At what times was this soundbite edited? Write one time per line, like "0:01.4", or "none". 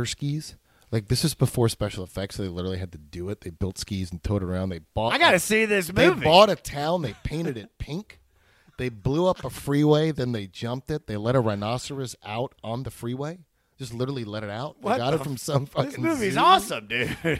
none